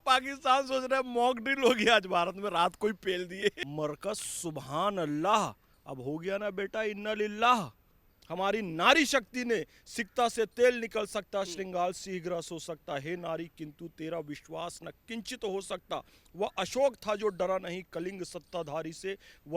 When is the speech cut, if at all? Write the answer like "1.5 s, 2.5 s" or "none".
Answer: 3.6 s, 8.2 s